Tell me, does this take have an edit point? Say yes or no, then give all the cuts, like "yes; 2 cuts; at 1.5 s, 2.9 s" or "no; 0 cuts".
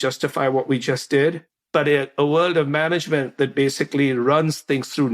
yes; 1 cut; at 1.5 s